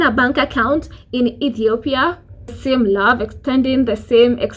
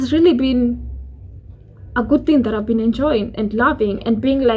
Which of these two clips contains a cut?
first; 1 cut; at 2.6 s

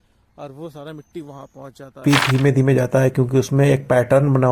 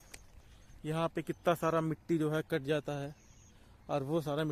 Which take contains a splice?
first; 1 cut; at 2.0 s

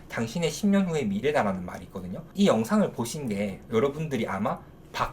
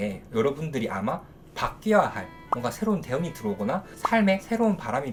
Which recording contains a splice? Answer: first; 1 cut; at 2.2 s

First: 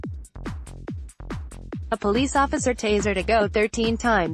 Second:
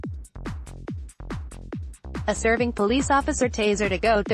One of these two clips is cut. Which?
first; 1 cut; at 2.0 s

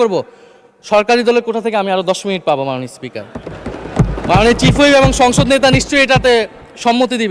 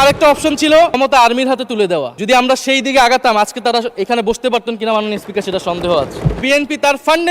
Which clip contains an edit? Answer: second; 3 cuts; at 1.0 s, 2.1 s, 6.4 s

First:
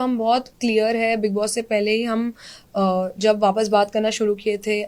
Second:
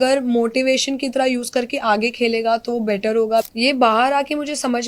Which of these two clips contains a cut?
second; 1 cut; at 3.5 s

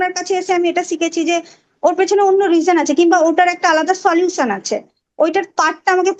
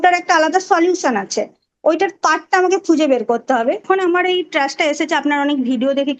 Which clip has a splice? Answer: second; 1 cut; at 3.8 s

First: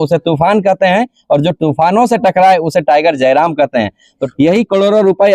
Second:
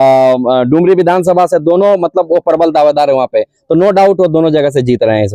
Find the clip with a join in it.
first; 1 cut; at 4.2 s

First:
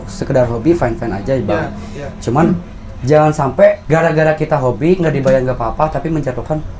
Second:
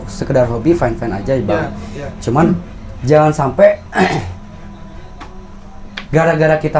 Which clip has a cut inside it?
first; 1 cut; at 3.8 s

